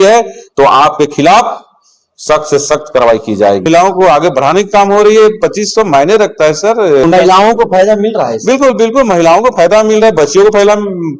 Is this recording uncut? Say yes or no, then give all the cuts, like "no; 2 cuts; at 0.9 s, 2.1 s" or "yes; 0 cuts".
no; 2 cuts; at 3.6 s, 7.0 s